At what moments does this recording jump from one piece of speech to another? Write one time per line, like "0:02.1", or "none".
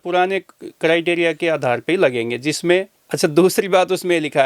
0:03.0